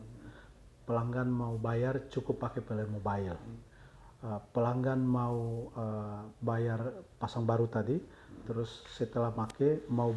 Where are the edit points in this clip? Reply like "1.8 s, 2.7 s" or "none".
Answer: none

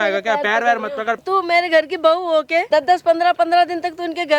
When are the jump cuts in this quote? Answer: 1.2 s, 2.7 s

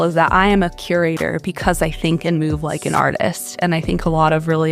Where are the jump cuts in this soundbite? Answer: none

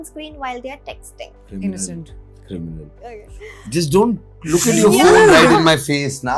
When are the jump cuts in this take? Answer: none

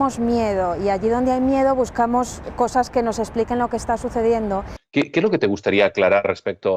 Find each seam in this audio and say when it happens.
4.9 s

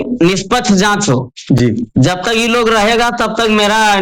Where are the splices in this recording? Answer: none

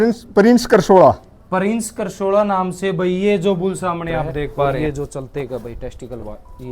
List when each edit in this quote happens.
4.8 s

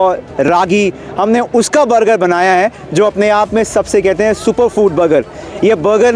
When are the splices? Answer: none

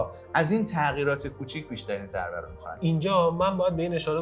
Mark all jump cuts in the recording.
2.8 s

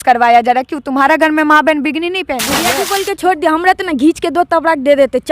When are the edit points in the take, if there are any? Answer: 2.7 s

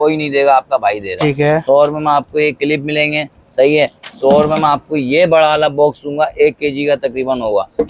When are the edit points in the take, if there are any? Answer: none

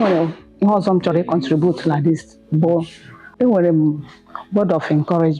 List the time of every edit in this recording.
3.2 s

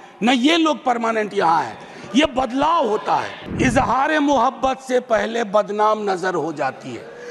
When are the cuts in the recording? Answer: 3.4 s

